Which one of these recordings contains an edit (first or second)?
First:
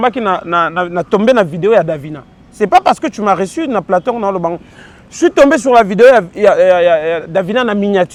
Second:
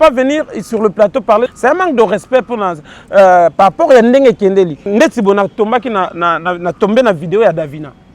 second